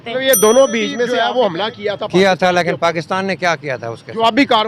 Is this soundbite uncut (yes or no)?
no